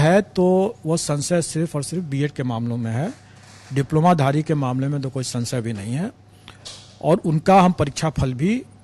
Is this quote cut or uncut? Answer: uncut